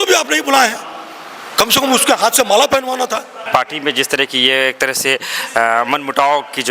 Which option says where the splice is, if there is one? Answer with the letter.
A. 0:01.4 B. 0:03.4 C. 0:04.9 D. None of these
B